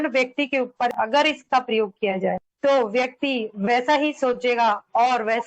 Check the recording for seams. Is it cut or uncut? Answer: uncut